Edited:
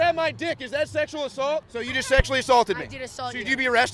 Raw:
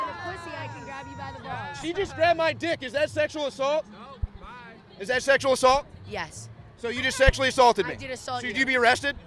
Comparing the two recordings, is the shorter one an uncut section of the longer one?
no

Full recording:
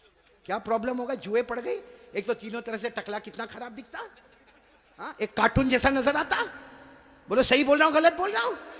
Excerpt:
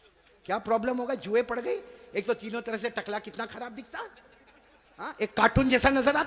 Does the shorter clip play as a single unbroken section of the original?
yes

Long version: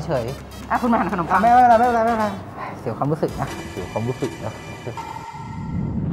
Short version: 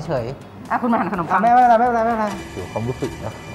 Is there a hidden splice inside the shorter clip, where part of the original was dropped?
yes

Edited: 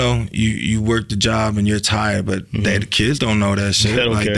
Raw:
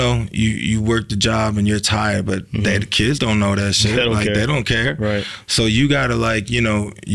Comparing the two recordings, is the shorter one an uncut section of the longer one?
yes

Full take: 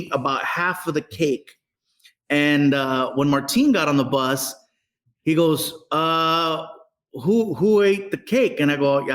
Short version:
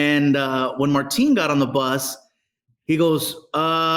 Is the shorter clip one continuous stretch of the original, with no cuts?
yes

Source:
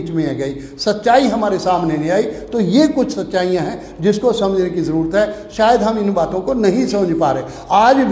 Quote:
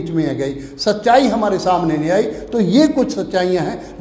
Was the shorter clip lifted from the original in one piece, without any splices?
yes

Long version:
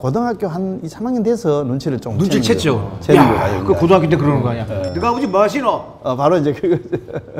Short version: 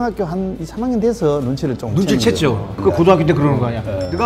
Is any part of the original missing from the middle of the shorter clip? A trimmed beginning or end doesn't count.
yes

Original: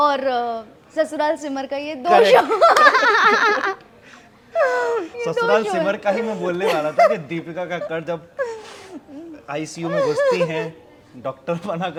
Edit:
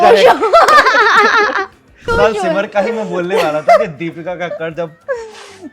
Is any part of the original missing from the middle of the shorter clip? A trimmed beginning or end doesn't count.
yes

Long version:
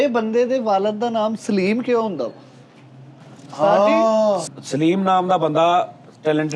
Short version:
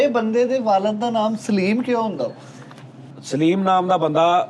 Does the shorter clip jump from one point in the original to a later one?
yes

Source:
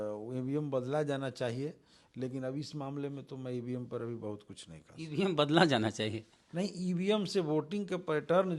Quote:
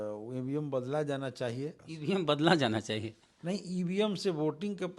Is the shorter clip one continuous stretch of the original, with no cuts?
no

